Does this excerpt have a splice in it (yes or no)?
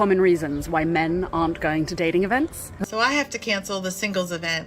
yes